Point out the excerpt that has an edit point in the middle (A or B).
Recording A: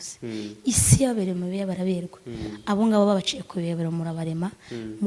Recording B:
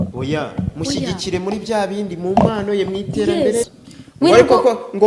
B